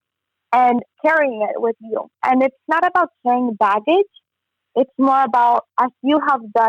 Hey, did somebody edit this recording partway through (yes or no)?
yes